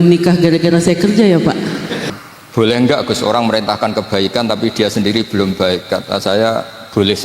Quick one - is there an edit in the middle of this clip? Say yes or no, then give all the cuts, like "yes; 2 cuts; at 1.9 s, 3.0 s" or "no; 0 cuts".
yes; 1 cut; at 2.0 s